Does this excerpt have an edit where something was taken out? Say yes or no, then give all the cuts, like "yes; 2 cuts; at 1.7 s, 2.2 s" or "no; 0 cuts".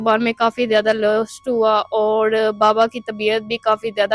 no; 0 cuts